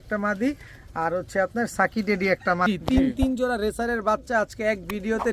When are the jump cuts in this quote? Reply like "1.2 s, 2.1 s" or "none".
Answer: 2.6 s